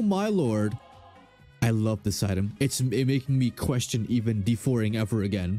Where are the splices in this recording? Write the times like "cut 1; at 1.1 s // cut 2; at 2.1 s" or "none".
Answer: none